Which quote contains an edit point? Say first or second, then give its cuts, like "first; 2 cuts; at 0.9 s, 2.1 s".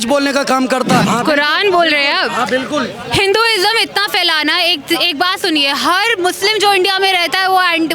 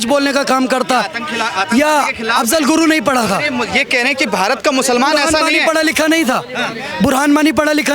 first; 1 cut; at 1.1 s